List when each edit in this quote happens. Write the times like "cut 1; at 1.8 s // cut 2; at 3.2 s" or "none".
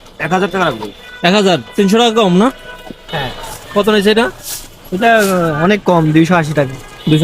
cut 1; at 3.0 s